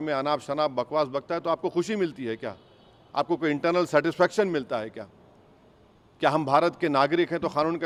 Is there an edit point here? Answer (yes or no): no